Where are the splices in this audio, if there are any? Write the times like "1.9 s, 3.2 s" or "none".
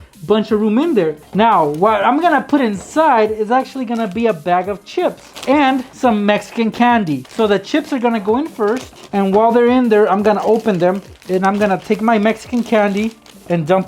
1.2 s, 5.9 s, 7.3 s, 9.0 s, 11.1 s